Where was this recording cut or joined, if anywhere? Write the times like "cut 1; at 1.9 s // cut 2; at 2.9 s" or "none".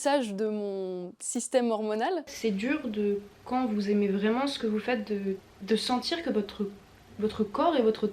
cut 1; at 2.3 s